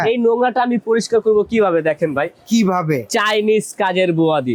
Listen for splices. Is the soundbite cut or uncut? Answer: uncut